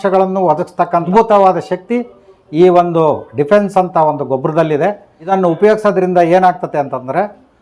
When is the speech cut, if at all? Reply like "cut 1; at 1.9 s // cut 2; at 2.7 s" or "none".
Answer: cut 1; at 1.1 s // cut 2; at 5.3 s